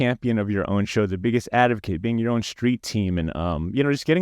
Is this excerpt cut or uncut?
uncut